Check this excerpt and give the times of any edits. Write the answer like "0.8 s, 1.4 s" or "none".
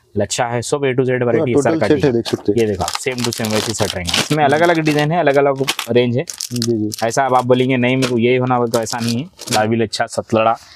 9.5 s